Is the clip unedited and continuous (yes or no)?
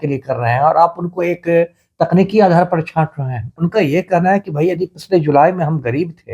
no